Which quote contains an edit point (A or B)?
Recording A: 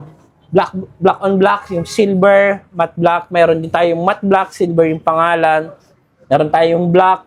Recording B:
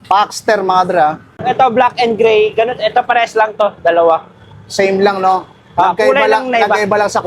B